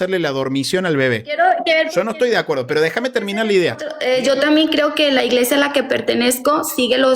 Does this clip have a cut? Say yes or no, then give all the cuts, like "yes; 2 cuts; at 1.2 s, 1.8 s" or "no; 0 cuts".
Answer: yes; 1 cut; at 3.9 s